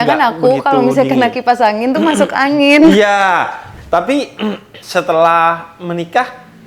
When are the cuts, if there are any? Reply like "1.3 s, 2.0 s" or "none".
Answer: 3.7 s